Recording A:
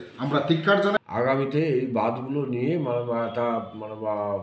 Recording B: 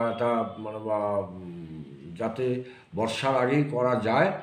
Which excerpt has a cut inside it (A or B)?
A